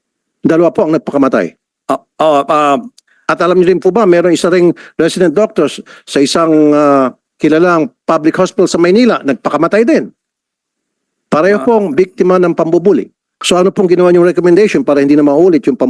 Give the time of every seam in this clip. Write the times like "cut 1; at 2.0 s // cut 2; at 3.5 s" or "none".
cut 1; at 13.3 s